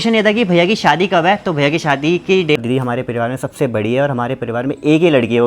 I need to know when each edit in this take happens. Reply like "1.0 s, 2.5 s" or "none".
2.6 s